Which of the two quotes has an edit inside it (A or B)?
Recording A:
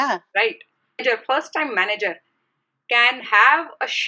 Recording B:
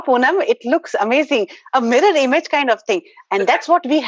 A